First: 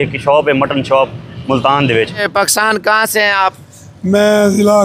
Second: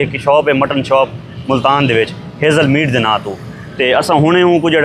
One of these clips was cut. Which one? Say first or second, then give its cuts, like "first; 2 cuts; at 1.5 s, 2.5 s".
first; 1 cut; at 2.2 s